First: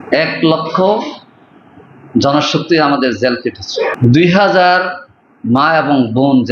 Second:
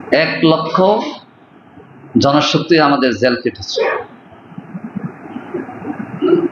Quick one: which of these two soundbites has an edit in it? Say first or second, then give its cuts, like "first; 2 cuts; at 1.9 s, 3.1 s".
first; 1 cut; at 3.9 s